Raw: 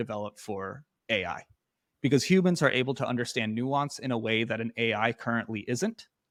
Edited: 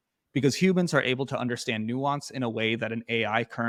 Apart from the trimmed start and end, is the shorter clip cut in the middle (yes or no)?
no